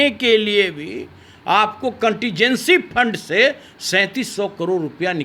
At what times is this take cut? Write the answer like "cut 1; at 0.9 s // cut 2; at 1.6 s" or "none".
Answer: none